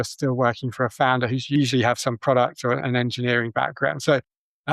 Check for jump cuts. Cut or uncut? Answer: cut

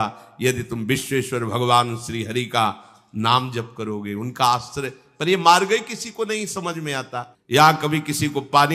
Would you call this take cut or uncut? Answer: cut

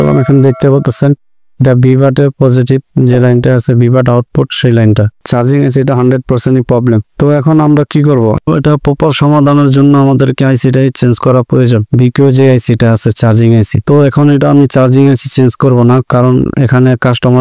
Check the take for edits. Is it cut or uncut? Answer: cut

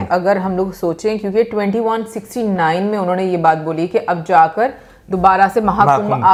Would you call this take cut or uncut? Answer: uncut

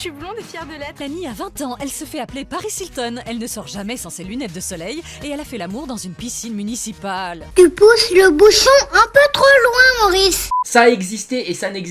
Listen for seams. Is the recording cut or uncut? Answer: cut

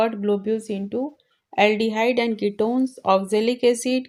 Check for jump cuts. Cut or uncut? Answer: uncut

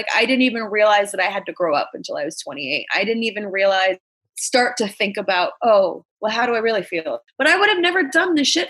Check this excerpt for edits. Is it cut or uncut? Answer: cut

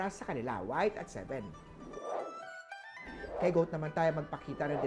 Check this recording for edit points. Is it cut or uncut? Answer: cut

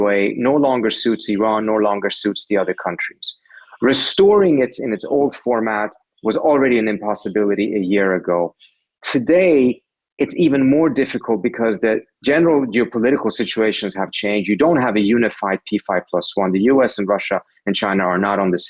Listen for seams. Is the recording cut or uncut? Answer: uncut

